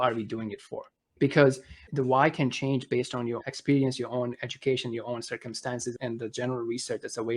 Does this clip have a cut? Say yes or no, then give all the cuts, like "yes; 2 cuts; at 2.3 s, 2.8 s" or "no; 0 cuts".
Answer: yes; 4 cuts; at 1.1 s, 1.8 s, 3.4 s, 6.0 s